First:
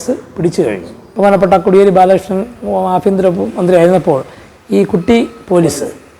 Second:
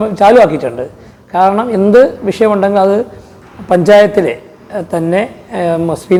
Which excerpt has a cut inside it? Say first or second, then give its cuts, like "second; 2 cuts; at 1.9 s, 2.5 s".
first; 1 cut; at 1.0 s